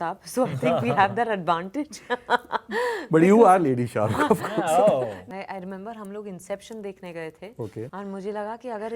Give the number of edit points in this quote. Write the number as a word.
two